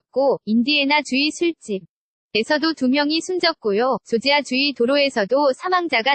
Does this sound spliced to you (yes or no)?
no